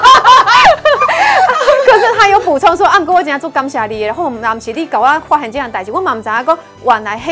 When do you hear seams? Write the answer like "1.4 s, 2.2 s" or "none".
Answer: none